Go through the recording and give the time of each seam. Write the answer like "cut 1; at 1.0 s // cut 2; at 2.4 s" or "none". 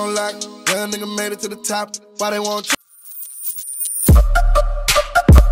cut 1; at 2.7 s